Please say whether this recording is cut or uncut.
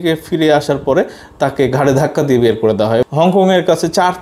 cut